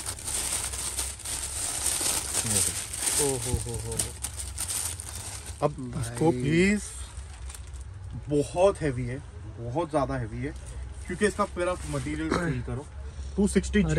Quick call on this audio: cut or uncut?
uncut